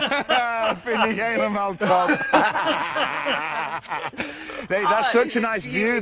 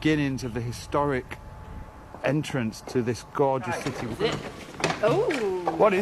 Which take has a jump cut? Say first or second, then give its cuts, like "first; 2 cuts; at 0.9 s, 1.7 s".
second; 1 cut; at 4.0 s